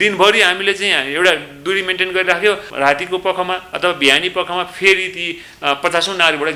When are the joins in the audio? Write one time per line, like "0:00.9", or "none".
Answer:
none